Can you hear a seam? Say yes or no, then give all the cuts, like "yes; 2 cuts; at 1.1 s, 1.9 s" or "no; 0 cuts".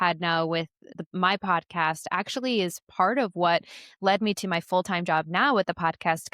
yes; 1 cut; at 1.0 s